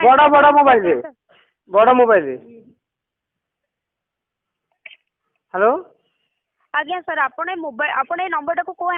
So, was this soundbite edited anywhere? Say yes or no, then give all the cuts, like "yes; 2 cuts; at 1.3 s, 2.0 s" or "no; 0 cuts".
no; 0 cuts